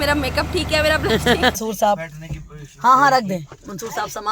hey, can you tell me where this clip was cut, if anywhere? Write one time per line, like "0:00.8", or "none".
0:01.6